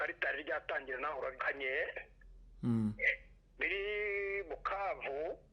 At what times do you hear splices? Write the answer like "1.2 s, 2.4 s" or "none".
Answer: 1.4 s